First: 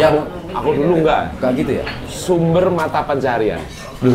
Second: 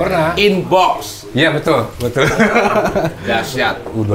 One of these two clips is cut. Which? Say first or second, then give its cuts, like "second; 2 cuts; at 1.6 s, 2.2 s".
first; 1 cut; at 1.8 s